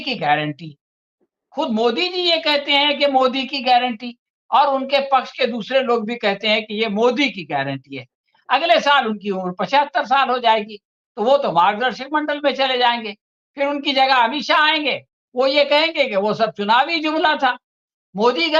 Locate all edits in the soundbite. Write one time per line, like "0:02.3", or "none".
none